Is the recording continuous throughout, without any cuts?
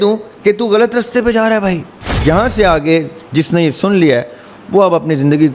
no; 1 cut; at 1.9 s

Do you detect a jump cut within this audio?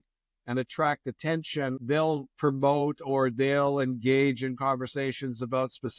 yes; 1 cut; at 1.8 s

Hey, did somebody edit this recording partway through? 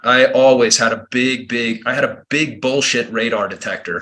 no; 0 cuts

